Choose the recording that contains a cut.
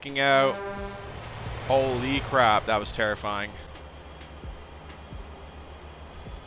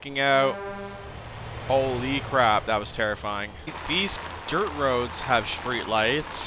second; 1 cut; at 3.8 s

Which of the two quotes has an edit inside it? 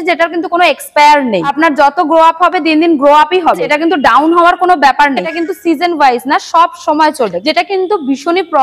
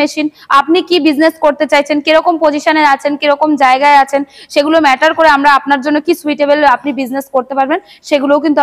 first; 4 cuts; at 1.5 s, 3.7 s, 5.3 s, 7.4 s

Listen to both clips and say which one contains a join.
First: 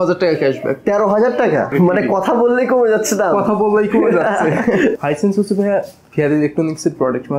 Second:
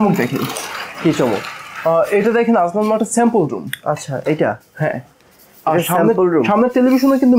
first; 2 cuts; at 1.7 s, 5.0 s

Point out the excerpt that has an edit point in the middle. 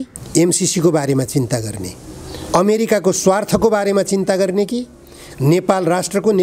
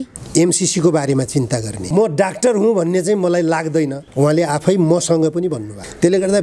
second; 1 cut; at 1.8 s

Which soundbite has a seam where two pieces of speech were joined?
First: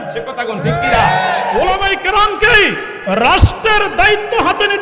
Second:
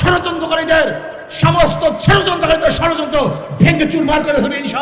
first; 1 cut; at 1.5 s

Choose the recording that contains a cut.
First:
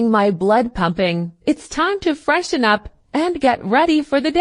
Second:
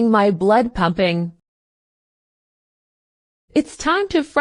first; 1 cut; at 1.3 s

